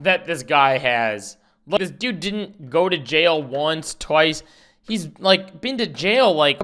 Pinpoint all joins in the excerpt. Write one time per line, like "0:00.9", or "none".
none